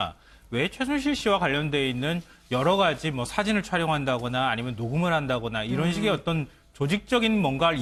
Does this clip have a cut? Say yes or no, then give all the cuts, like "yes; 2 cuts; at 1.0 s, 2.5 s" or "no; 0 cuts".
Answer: no; 0 cuts